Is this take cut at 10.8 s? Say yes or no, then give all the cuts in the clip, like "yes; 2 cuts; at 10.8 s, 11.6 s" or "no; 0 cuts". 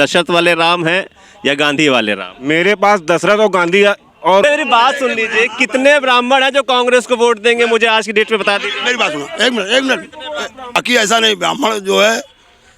yes; 2 cuts; at 4.4 s, 10.8 s